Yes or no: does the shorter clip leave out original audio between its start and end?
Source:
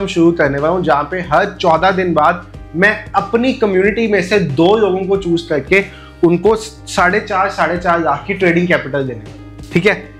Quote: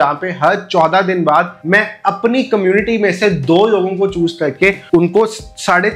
yes